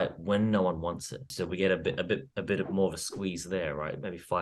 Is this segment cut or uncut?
cut